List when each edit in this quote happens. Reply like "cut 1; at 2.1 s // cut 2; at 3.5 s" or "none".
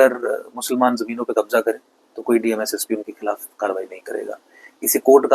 none